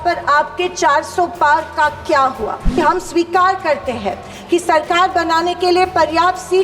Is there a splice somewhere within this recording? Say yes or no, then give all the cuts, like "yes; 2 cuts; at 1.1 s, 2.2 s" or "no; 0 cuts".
yes; 1 cut; at 2.8 s